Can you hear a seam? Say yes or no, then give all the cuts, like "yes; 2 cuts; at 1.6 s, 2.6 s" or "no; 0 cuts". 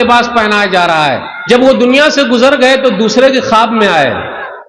yes; 1 cut; at 1.3 s